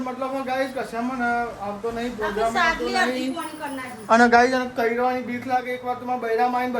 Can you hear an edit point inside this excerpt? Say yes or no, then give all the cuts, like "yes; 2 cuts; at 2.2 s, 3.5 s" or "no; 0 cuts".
no; 0 cuts